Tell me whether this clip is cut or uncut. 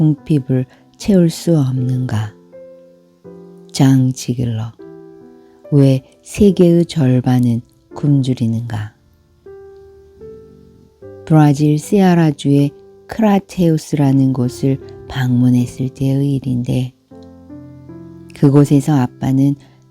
cut